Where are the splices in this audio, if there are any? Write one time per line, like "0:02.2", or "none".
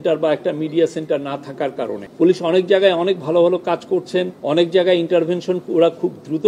0:02.0
0:04.4